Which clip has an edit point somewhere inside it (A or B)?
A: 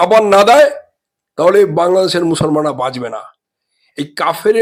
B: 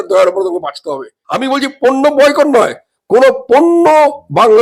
B